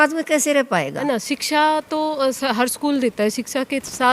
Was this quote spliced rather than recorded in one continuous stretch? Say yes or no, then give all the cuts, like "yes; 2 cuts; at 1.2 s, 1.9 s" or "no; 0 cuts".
yes; 1 cut; at 0.9 s